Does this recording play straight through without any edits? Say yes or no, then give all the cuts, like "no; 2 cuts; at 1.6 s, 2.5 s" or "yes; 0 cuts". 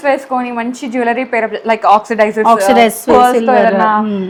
yes; 0 cuts